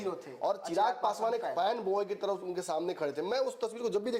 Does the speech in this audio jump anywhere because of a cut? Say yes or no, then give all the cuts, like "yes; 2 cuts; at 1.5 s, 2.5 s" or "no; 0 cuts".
no; 0 cuts